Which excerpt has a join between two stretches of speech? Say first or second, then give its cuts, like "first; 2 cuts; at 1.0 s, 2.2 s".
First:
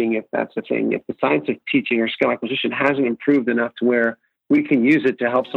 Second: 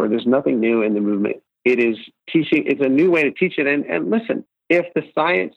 second; 3 cuts; at 1.5 s, 2.1 s, 4.5 s